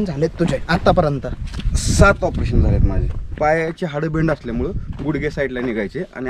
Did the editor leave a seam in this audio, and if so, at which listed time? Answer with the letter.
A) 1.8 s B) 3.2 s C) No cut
B